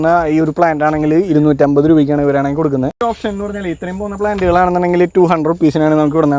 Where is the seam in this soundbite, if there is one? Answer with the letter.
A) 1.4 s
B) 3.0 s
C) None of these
B